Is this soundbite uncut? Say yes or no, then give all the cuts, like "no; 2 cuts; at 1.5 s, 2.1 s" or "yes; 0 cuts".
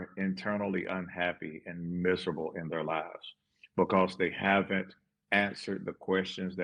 yes; 0 cuts